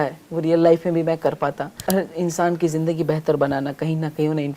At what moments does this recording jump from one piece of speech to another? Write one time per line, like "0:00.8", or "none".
0:01.8